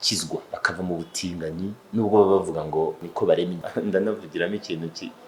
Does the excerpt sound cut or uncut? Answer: cut